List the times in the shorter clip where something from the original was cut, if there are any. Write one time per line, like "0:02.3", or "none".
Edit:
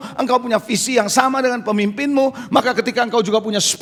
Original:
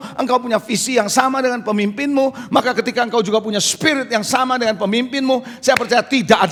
none